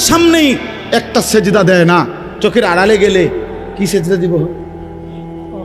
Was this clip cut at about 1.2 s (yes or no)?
no